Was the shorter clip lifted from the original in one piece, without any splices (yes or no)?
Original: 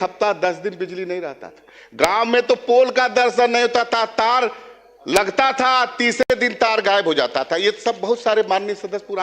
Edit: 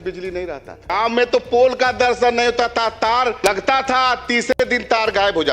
no